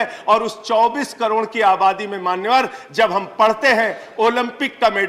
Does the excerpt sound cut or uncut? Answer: uncut